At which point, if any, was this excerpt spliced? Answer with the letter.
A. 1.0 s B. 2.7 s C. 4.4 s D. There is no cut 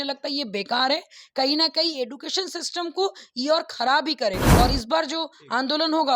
C